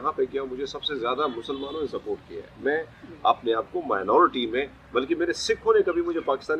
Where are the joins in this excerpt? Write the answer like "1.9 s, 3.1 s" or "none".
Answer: none